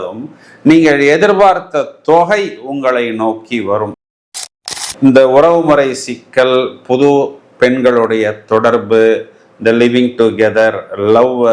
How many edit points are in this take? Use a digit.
1